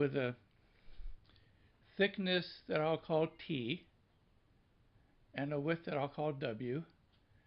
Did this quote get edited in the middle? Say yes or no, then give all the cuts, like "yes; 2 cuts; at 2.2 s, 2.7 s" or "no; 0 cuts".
yes; 1 cut; at 1.8 s